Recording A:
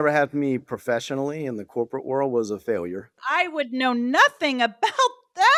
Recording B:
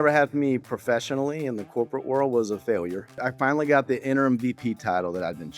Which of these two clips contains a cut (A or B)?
B